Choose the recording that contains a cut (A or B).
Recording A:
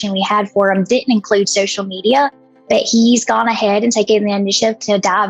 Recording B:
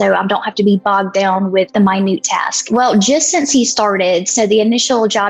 B